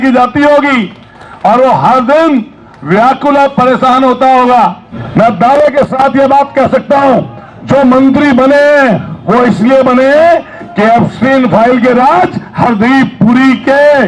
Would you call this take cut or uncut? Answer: cut